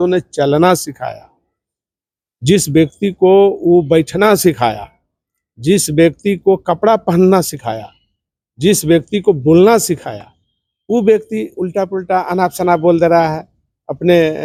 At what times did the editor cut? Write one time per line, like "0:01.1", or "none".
none

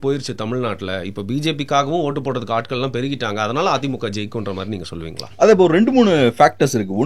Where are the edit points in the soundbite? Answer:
none

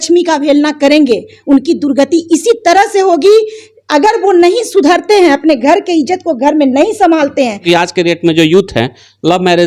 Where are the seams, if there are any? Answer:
0:07.6

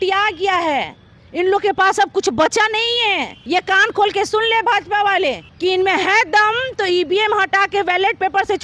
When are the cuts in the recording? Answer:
0:03.3
0:05.5

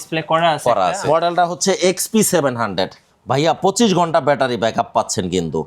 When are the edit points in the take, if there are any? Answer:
0:01.0

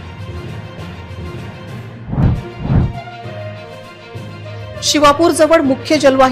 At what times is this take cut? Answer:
none

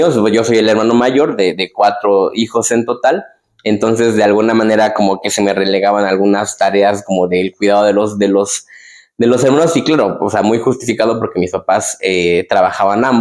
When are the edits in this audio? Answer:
none

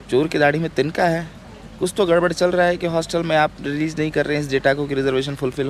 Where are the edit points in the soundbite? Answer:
none

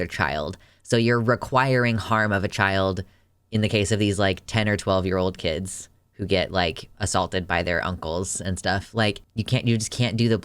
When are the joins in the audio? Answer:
0:09.2

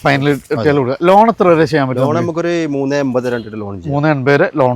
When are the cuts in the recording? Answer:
none

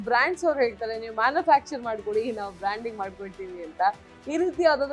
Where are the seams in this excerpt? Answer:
none

